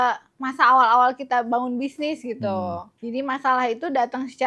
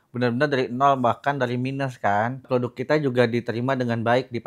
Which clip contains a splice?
second; 1 cut; at 2.4 s

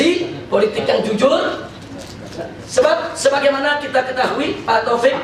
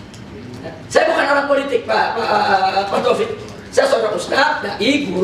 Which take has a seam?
second; 1 cut; at 3.4 s

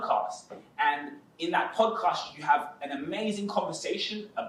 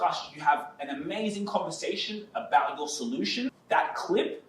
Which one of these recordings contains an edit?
second; 1 cut; at 3.6 s

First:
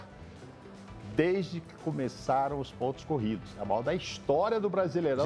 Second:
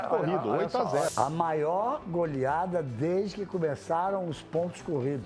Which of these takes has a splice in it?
second; 1 cut; at 1.1 s

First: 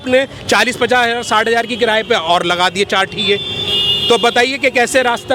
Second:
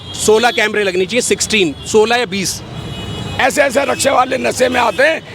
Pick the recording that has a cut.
second; 1 cut; at 3.4 s

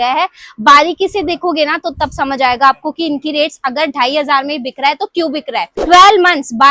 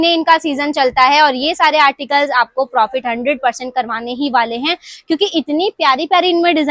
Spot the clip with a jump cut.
first; 1 cut; at 5.7 s

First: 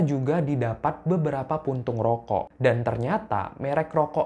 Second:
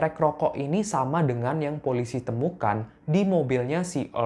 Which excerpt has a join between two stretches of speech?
first; 1 cut; at 2.5 s

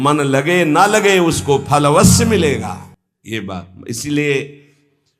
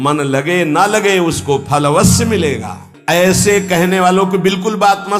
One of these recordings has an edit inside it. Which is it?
second; 1 cut; at 2.9 s

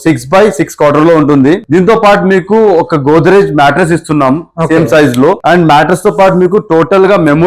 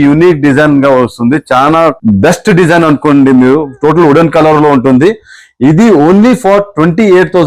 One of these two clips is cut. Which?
first; 2 cuts; at 1.6 s, 5.4 s

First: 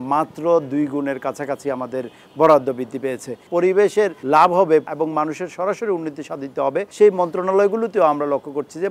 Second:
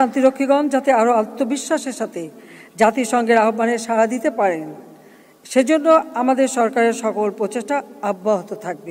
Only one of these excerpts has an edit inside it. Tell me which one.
first; 4 cuts; at 3.4 s, 4.2 s, 4.9 s, 6.9 s

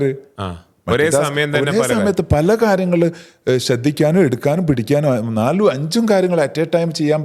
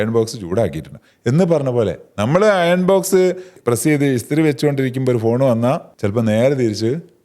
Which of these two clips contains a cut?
second; 2 cuts; at 3.5 s, 5.9 s

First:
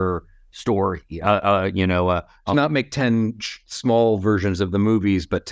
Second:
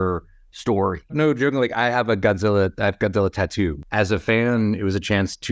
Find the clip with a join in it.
second; 2 cuts; at 1.1 s, 3.8 s

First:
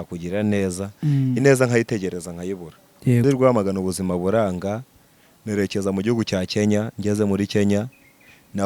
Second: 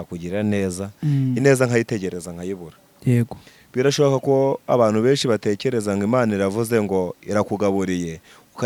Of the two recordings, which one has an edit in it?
first; 1 cut; at 3.2 s

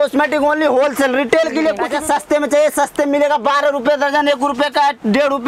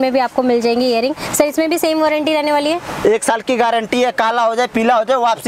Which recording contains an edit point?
first; 1 cut; at 1.8 s

